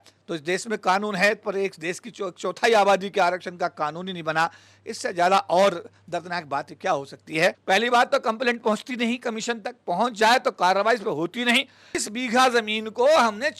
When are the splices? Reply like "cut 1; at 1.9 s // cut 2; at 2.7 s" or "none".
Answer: cut 1; at 7.6 s // cut 2; at 11.9 s